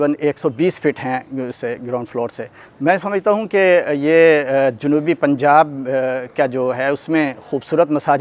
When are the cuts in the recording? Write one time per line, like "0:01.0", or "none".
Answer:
none